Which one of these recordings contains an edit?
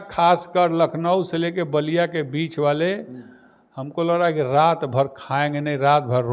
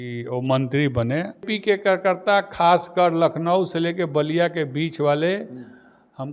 second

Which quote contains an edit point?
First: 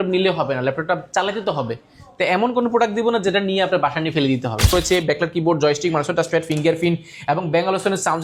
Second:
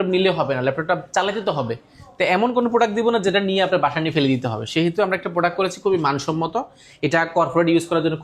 first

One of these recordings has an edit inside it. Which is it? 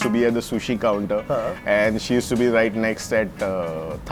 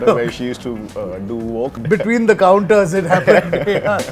second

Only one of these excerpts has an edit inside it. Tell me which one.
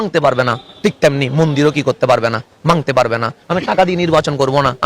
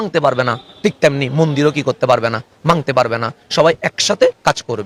first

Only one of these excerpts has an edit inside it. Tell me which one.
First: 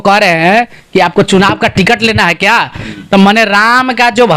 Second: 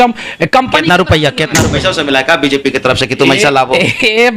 second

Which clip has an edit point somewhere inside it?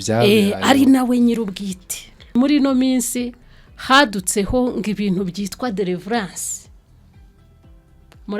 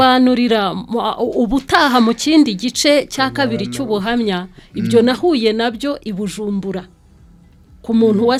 first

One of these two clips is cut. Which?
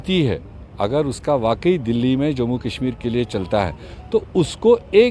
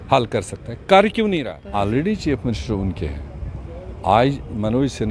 second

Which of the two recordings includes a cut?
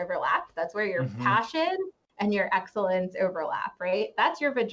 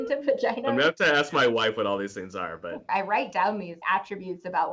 second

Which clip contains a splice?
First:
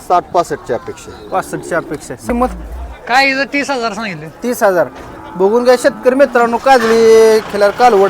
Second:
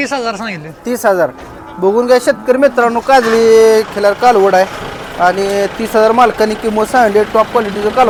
first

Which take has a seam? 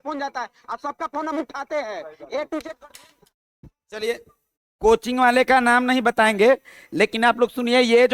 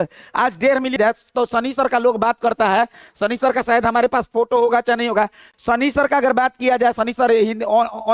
second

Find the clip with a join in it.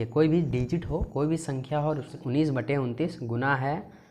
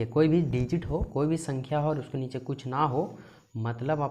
first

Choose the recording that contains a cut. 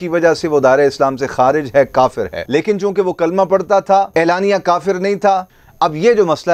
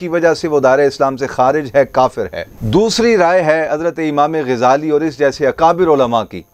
first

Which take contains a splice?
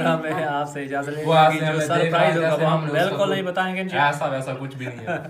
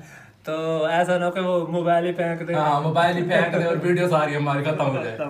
first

